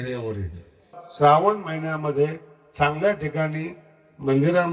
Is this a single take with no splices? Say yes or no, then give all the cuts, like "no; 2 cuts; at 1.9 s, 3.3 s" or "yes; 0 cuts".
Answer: no; 1 cut; at 1.0 s